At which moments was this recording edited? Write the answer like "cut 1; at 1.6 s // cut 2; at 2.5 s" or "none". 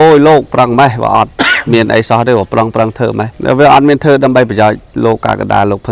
cut 1; at 3.3 s